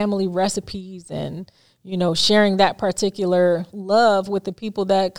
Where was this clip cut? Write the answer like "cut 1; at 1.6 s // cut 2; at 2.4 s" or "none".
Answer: none